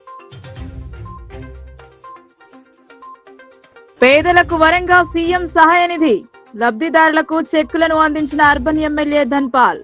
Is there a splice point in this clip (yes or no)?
yes